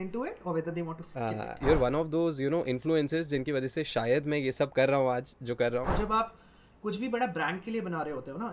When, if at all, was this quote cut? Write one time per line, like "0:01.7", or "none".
0:01.6
0:05.9

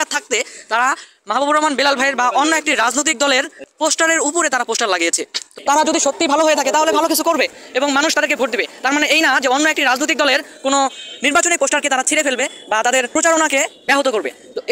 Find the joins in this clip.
0:05.5
0:13.1
0:13.8

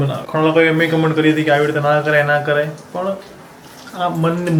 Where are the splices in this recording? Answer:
none

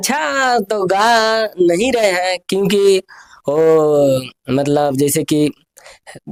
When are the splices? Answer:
none

